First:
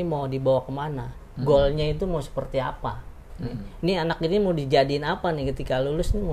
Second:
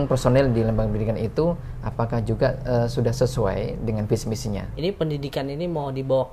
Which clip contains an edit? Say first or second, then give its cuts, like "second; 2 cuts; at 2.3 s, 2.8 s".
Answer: second; 1 cut; at 4.7 s